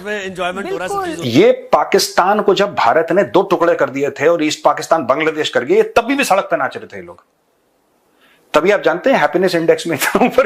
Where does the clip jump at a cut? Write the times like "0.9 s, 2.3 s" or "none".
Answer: 1.2 s